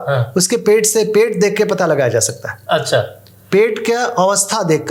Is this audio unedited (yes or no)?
yes